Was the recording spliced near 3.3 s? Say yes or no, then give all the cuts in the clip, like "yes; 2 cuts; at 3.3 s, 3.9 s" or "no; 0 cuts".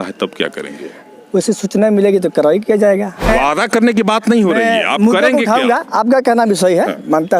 yes; 1 cut; at 3.3 s